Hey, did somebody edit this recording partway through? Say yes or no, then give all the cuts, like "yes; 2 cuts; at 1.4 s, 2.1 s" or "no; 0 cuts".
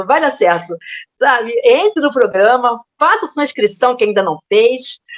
no; 0 cuts